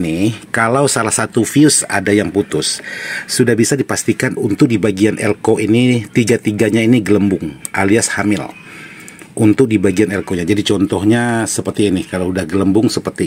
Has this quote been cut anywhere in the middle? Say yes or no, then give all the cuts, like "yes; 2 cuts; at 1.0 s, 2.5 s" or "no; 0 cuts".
no; 0 cuts